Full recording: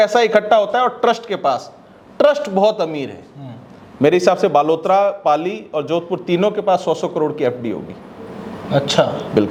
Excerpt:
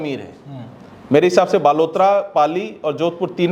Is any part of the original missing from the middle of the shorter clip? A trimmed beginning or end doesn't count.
no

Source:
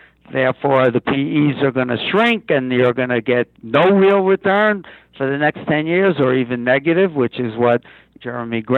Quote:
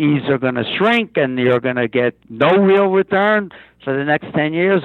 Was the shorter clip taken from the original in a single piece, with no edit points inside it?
yes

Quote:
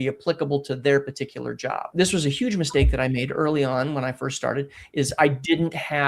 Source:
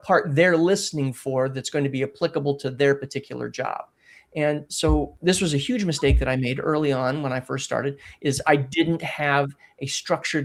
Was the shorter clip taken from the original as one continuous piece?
no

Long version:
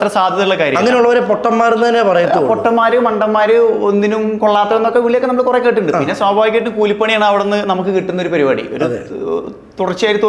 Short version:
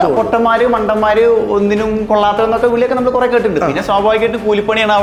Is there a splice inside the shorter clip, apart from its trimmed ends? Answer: no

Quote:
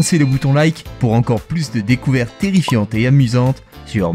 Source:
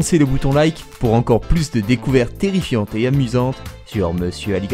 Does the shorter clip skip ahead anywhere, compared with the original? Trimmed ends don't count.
no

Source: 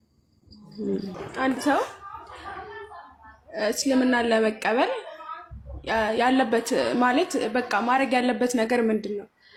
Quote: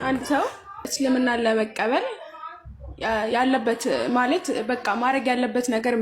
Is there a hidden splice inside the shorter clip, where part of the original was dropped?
yes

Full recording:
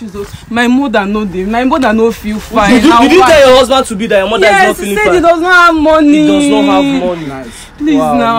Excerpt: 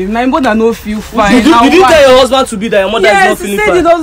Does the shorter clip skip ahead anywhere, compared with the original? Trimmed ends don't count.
no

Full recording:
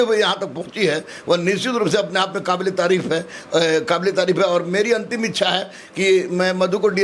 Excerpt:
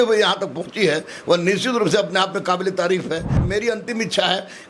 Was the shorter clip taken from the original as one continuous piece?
no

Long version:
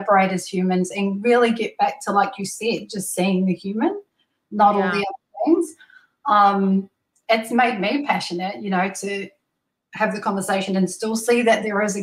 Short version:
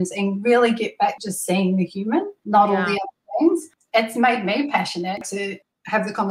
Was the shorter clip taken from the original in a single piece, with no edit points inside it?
no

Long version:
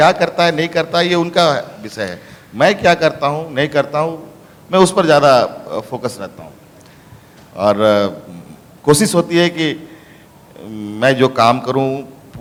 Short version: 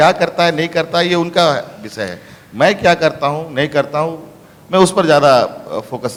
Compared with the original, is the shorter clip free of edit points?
yes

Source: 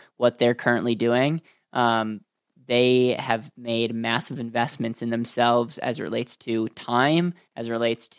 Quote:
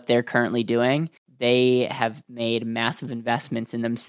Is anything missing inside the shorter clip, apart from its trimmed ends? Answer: yes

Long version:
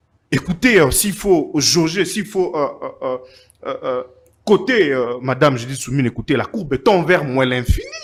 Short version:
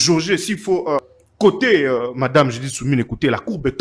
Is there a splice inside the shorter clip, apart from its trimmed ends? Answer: yes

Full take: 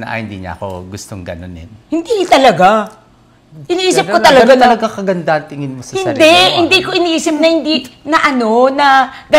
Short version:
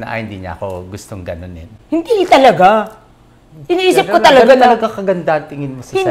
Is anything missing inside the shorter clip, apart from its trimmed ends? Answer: no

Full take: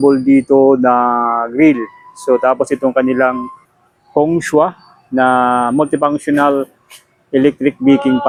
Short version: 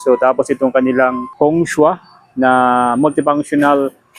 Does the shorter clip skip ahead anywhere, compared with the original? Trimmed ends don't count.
yes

